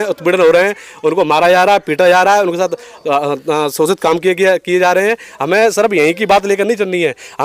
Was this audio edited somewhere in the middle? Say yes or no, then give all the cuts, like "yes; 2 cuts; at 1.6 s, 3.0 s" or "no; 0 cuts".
no; 0 cuts